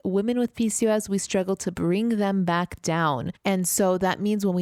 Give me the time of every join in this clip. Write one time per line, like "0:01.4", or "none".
none